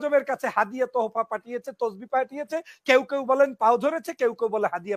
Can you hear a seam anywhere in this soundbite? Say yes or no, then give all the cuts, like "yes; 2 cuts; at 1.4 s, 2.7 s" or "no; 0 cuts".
no; 0 cuts